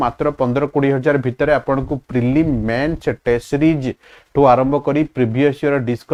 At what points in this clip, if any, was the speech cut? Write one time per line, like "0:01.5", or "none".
none